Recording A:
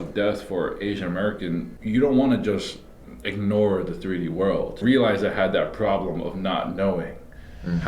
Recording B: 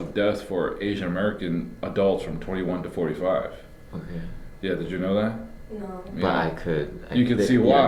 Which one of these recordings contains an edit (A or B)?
A